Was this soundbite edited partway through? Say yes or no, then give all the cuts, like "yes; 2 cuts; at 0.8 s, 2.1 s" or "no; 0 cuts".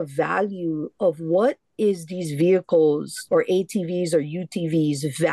no; 0 cuts